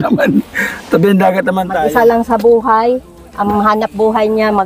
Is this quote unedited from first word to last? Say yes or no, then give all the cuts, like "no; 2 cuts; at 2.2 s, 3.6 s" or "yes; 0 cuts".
no; 1 cut; at 1.8 s